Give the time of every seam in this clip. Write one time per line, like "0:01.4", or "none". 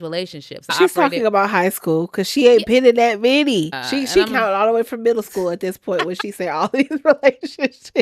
0:00.7
0:03.8